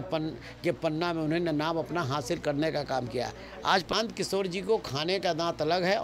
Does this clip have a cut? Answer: yes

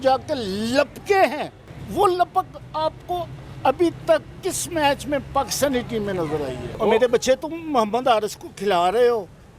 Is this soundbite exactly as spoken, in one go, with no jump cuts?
no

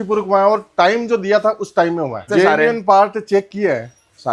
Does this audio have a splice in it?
yes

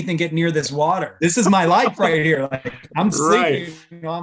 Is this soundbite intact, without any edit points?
no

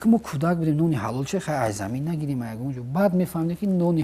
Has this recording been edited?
no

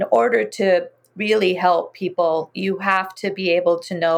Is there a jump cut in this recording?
no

